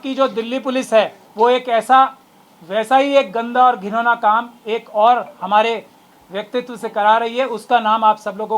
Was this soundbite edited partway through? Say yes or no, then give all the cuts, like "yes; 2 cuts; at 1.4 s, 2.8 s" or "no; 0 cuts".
yes; 1 cut; at 1.2 s